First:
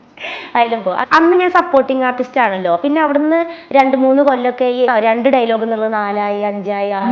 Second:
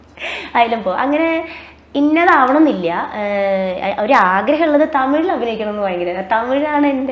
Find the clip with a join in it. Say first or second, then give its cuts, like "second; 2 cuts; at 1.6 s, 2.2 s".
first; 2 cuts; at 1.0 s, 4.9 s